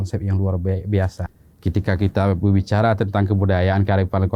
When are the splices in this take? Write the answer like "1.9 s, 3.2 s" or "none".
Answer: 1.3 s